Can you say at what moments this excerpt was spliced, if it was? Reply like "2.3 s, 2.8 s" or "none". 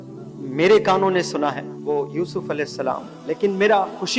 1.7 s, 3.1 s